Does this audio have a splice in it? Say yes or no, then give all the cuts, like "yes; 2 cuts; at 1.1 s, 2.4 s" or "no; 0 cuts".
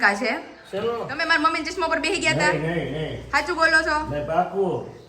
yes; 1 cut; at 1.1 s